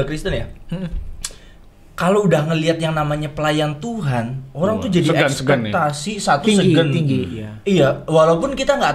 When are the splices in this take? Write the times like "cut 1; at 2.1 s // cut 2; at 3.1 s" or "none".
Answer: none